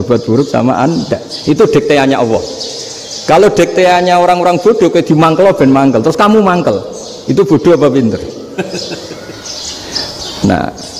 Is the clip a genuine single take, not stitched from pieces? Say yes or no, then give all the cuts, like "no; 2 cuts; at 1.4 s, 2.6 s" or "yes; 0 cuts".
yes; 0 cuts